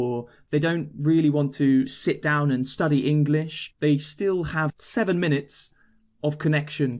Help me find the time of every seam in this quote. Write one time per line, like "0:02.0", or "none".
0:03.6
0:04.8